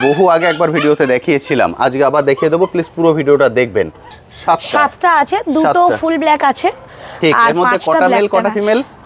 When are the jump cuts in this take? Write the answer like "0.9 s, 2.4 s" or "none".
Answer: 4.3 s